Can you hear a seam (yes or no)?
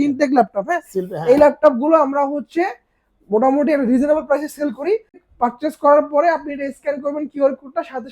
yes